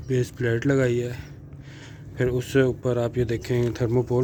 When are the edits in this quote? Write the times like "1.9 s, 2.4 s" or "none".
none